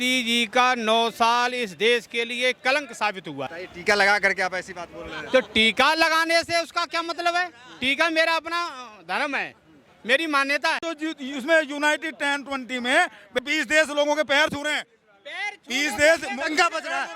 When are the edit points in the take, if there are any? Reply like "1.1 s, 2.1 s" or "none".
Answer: 3.5 s, 10.9 s, 13.4 s